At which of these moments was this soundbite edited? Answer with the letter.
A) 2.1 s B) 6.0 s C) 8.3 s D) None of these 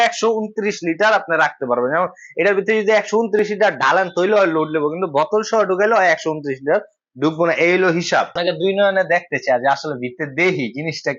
C